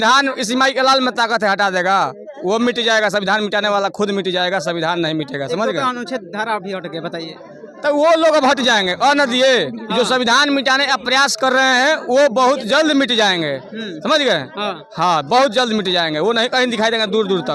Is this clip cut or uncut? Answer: uncut